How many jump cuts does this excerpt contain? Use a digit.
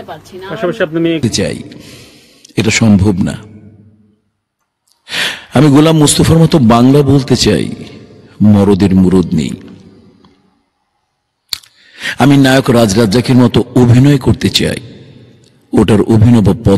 1